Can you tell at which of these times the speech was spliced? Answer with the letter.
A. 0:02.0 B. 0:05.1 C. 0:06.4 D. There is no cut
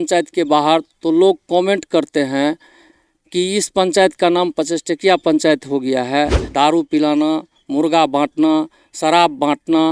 C